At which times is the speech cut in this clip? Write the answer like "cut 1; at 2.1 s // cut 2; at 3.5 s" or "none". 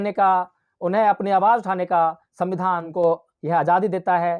cut 1; at 2.9 s